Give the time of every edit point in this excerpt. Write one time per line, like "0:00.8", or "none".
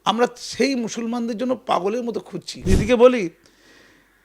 0:02.5